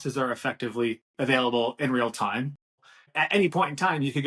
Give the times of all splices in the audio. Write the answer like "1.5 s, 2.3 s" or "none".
2.9 s